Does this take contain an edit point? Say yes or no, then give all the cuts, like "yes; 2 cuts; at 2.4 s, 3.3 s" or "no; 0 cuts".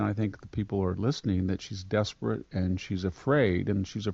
no; 0 cuts